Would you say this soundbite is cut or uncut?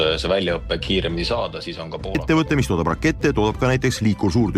cut